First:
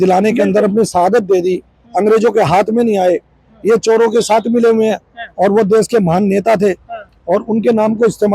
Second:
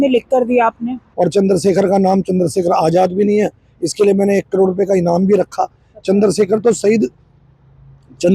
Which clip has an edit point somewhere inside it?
second; 1 cut; at 1.0 s

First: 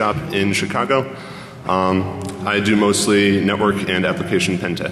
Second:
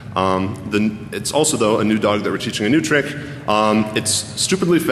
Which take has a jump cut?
second; 1 cut; at 1.4 s

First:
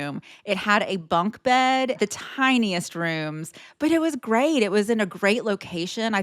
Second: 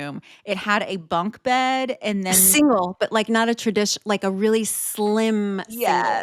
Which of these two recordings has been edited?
first; 1 cut; at 2.0 s

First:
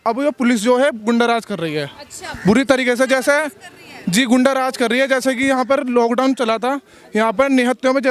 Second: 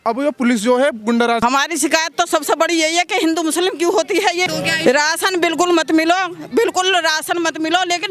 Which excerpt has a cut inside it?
second; 2 cuts; at 1.4 s, 4.5 s

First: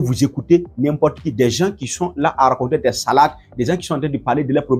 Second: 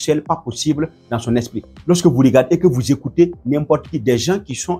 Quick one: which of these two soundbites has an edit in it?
second; 1 cut; at 1.7 s

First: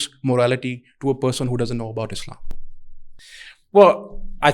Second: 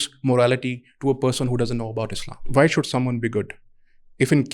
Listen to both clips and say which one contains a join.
second; 1 cut; at 2.5 s

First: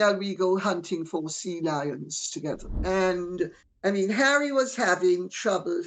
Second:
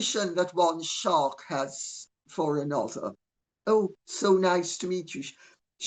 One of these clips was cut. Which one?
first; 1 cut; at 2.7 s

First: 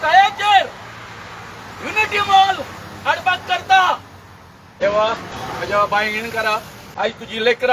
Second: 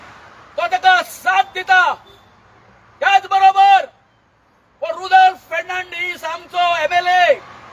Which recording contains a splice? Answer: first; 3 cuts; at 4.7 s, 5.3 s, 6.8 s

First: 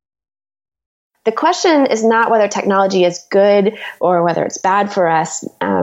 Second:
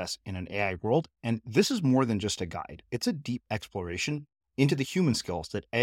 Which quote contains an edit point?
first; 1 cut; at 1.0 s

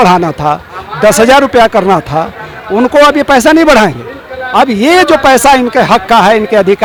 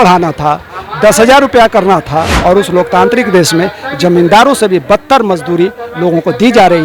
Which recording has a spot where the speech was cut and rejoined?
second; 1 cut; at 2.3 s

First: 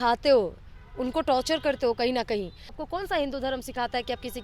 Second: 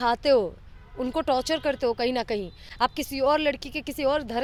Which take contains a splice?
first; 1 cut; at 2.7 s

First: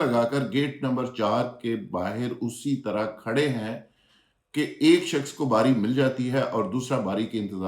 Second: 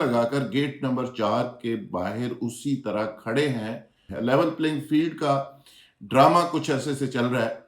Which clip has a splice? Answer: second; 1 cut; at 4.1 s

